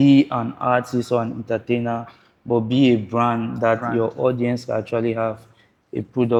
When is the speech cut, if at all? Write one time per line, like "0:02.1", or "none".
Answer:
none